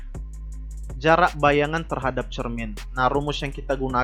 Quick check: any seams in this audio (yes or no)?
yes